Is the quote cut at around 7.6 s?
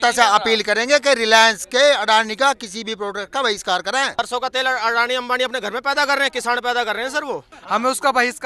yes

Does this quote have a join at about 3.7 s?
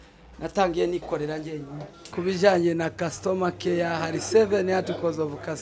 no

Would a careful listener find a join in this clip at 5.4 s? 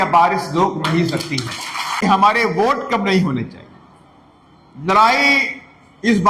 no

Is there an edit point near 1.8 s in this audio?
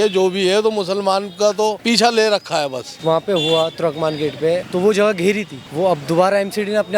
yes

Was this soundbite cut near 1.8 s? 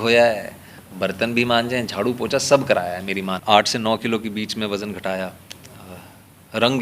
no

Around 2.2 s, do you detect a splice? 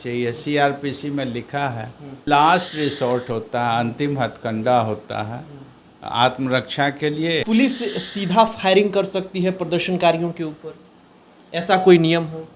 yes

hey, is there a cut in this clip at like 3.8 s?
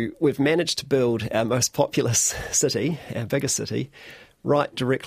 no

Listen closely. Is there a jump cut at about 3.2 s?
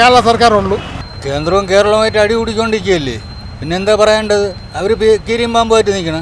no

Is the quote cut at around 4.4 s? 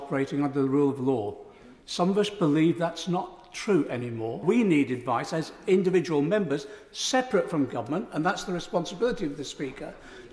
yes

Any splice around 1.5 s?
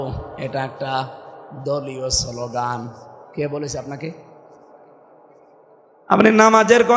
no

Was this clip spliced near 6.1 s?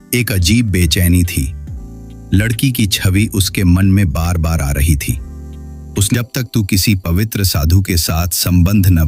yes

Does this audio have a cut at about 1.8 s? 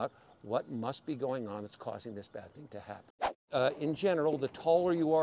no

